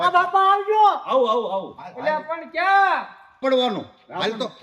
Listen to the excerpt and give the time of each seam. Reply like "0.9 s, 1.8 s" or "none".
3.4 s